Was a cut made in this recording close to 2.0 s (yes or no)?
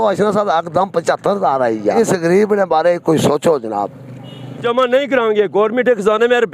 yes